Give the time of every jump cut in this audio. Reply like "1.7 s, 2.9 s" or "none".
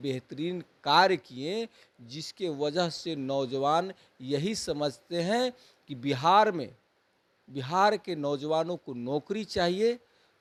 none